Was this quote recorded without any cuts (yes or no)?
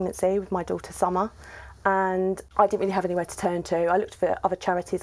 no